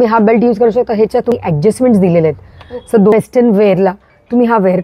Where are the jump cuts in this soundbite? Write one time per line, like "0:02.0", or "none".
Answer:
0:01.3
0:03.1